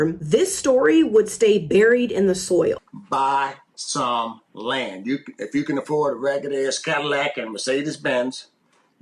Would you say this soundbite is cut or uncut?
cut